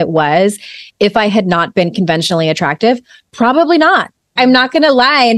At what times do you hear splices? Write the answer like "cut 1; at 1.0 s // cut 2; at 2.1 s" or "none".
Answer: cut 1; at 4.3 s